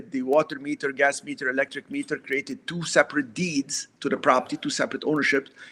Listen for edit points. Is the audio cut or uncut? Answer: uncut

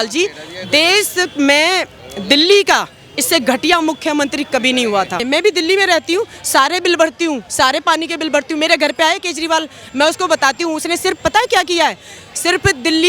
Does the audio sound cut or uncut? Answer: cut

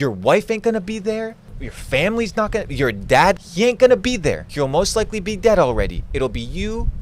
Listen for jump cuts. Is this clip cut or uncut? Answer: cut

